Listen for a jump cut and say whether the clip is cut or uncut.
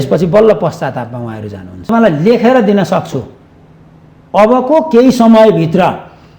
cut